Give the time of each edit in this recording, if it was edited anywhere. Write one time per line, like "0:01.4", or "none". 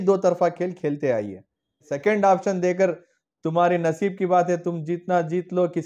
0:01.9